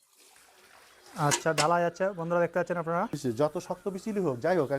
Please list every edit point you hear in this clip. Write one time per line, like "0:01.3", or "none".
0:03.4